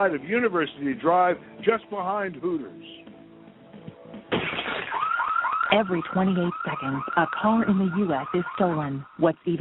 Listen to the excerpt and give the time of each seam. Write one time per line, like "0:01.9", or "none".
0:04.3